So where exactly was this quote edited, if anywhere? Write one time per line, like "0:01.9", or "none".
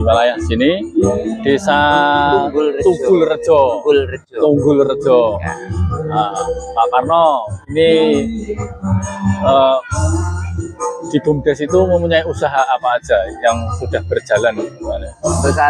none